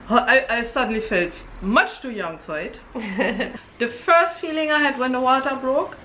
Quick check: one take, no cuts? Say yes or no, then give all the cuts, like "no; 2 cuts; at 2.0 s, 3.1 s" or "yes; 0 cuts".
no; 1 cut; at 3.5 s